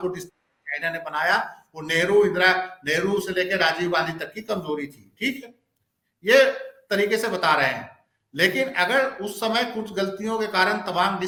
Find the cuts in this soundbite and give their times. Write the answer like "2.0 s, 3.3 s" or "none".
none